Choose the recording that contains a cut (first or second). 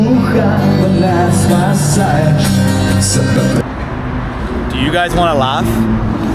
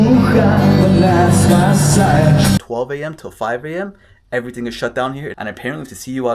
second